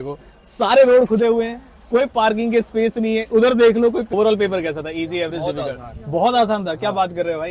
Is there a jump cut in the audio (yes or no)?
yes